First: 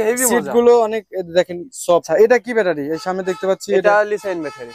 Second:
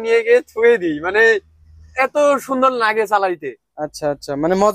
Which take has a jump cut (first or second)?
first